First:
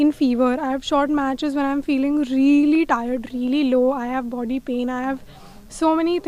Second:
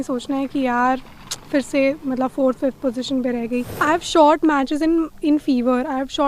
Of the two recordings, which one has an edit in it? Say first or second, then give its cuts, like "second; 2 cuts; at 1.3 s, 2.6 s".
second; 1 cut; at 3.7 s